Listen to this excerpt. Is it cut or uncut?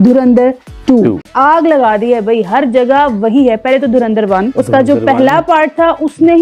cut